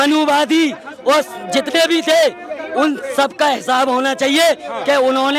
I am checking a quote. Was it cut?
no; 0 cuts

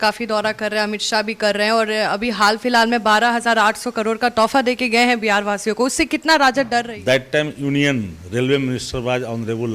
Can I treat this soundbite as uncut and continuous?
no; 1 cut; at 6.8 s

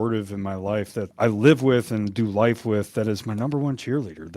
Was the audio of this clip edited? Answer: yes; 1 cut; at 1.1 s

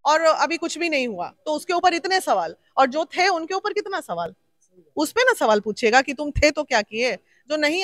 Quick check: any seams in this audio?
no; 0 cuts

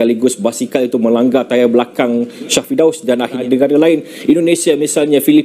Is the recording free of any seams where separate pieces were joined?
no; 1 cut; at 3.4 s

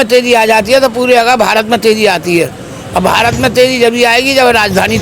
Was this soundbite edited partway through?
no; 0 cuts

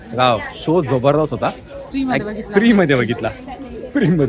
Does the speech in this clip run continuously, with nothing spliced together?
yes; 0 cuts

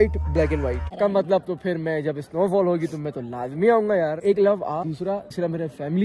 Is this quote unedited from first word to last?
no; 1 cut; at 0.9 s

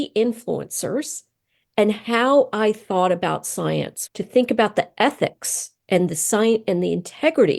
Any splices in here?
yes; 1 cut; at 4.0 s

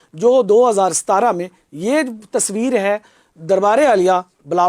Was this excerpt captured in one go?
yes; 0 cuts

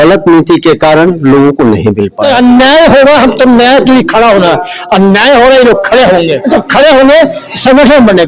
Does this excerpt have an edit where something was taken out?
yes; 2 cuts; at 2.2 s, 6.4 s

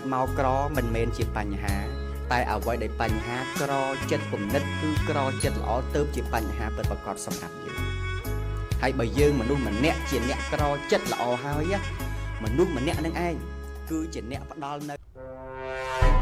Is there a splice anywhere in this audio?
yes; 1 cut; at 15.0 s

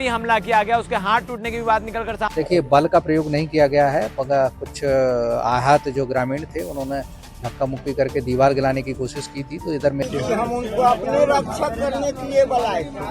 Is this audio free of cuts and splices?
no; 2 cuts; at 2.2 s, 10.0 s

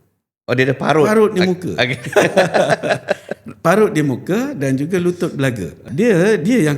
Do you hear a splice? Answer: yes; 1 cut; at 5.8 s

